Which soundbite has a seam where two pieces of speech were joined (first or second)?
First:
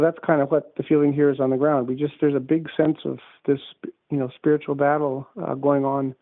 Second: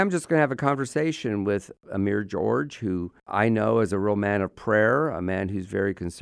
second